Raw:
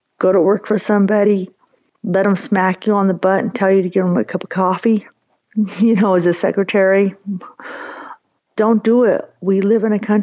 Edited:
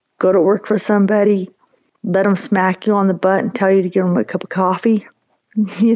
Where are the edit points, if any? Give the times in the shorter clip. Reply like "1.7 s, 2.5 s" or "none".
none